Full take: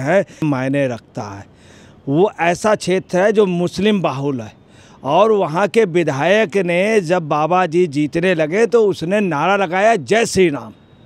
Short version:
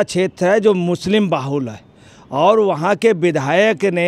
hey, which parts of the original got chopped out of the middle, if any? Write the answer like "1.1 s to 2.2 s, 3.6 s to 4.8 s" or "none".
none